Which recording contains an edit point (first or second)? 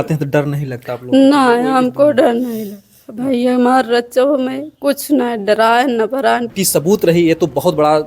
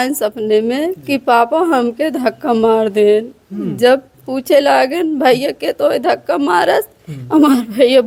first